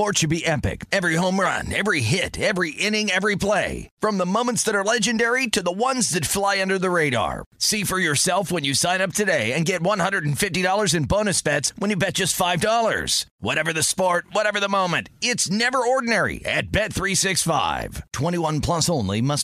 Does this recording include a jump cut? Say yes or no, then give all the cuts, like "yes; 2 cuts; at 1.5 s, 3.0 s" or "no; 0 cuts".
no; 0 cuts